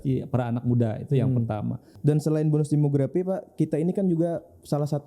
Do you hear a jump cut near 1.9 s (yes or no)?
yes